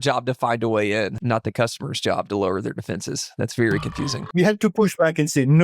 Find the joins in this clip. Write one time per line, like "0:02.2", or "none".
0:01.2
0:04.2

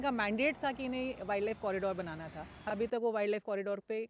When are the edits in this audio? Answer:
0:02.6

